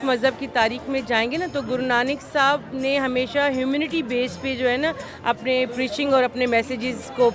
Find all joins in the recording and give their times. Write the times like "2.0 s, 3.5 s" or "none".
none